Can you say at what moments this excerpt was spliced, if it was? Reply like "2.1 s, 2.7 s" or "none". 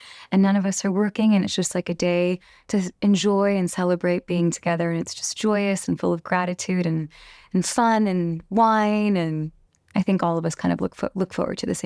none